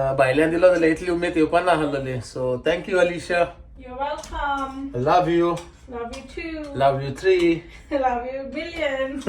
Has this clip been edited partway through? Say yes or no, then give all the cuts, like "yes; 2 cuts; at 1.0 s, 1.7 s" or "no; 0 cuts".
no; 0 cuts